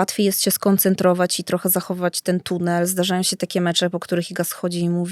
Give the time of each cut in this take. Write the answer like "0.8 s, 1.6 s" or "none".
none